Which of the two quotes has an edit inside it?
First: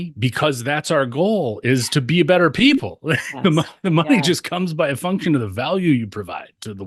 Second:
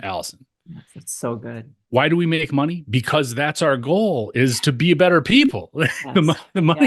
second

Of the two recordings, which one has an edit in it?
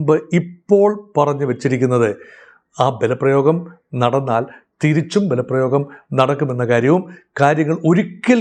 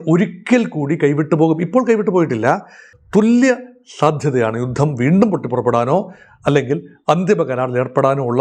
second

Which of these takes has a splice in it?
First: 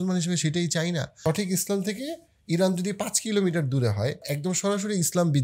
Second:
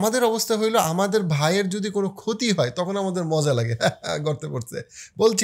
first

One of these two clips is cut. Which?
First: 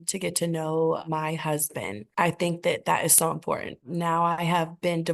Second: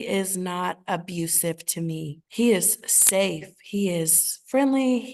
first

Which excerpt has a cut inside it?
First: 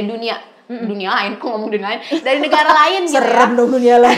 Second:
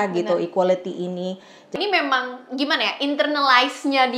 second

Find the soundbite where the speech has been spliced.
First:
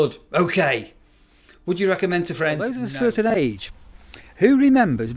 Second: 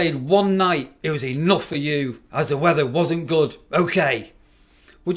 first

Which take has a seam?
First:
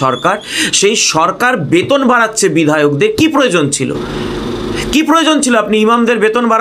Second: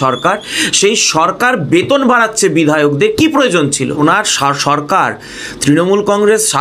second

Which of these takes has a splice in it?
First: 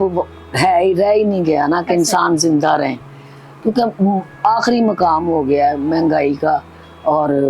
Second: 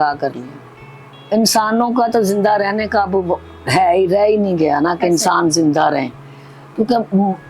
second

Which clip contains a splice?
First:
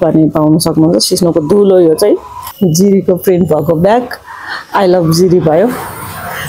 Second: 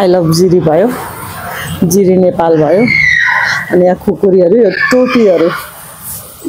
first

